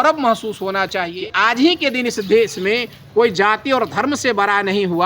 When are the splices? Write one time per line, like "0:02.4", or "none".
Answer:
0:01.1